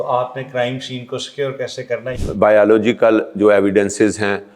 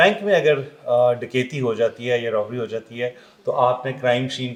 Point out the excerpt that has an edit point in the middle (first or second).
first